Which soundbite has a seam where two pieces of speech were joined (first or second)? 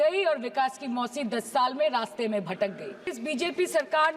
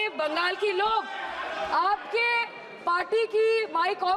first